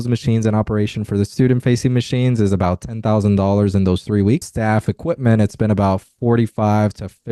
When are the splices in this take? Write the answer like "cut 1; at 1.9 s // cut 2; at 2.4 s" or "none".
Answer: cut 1; at 4.5 s